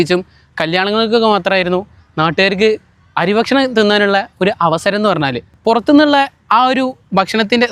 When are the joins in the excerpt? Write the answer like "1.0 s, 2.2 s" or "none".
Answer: 5.5 s